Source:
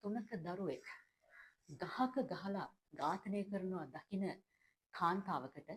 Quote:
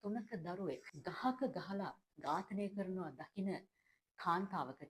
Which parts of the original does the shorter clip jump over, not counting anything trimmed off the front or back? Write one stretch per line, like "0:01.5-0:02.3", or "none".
0:00.9-0:01.7